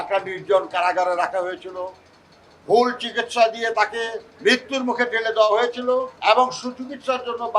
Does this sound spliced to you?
yes; 2 cuts; at 4.3 s, 6.1 s

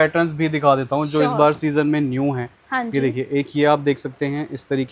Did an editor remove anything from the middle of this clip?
no; 0 cuts

